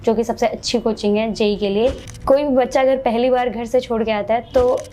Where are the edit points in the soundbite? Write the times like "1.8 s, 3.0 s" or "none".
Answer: 2.1 s